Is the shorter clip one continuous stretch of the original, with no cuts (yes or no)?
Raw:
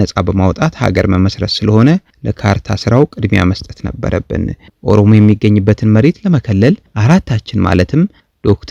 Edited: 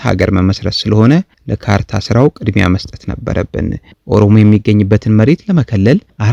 yes